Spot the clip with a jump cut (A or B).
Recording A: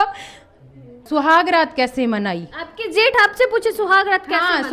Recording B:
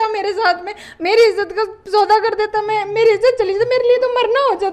A